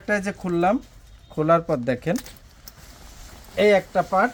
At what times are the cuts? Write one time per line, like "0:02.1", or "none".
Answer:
none